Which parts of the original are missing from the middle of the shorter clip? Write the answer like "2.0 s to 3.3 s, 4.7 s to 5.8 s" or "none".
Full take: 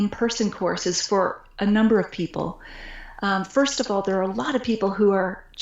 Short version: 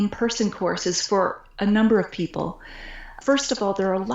3.2 s to 3.5 s